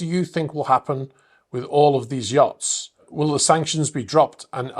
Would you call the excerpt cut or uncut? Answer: cut